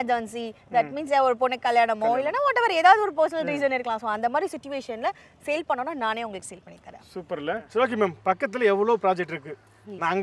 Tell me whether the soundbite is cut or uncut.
cut